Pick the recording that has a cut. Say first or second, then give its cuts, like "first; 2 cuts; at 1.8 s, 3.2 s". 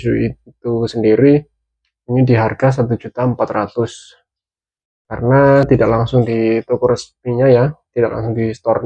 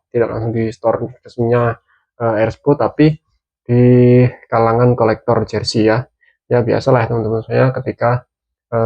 first; 1 cut; at 5.6 s